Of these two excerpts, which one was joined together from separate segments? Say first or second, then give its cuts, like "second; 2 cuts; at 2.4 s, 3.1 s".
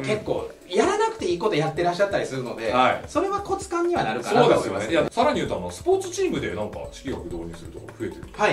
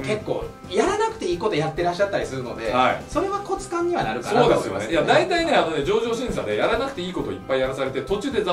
first; 1 cut; at 5.1 s